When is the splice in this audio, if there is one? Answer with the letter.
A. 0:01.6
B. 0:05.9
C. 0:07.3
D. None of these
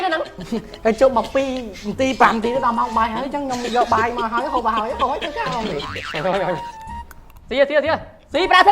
B